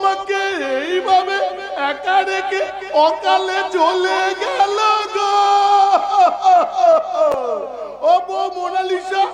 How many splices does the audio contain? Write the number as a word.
zero